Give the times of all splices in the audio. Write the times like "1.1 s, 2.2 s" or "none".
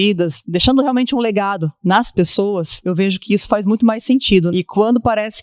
2.8 s, 4.5 s